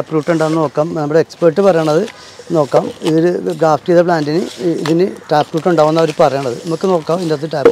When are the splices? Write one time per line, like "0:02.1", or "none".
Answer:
none

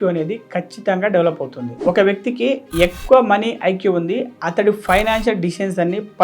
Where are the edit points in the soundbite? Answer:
0:01.7

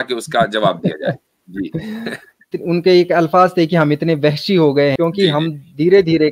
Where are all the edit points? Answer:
0:02.6
0:04.9

